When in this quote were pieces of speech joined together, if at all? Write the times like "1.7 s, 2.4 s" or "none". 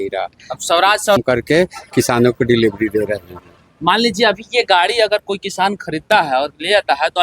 1.2 s

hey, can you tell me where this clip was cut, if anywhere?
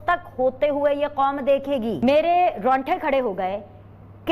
2.0 s

